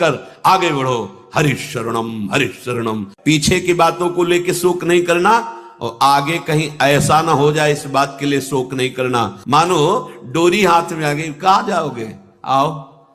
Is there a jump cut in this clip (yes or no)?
yes